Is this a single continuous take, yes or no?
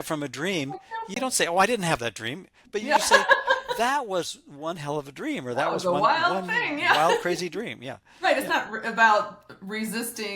no